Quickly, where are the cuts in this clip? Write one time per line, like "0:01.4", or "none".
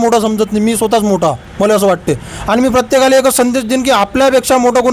none